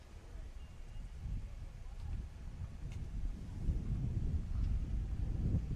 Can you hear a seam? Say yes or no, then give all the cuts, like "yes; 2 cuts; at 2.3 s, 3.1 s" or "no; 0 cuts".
yes; 1 cut; at 2.6 s